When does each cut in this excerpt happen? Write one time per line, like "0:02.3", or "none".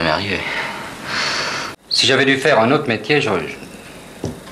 0:01.8